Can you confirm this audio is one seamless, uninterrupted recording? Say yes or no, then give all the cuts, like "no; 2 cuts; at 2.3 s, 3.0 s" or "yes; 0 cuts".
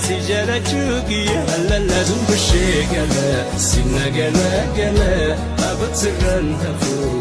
yes; 0 cuts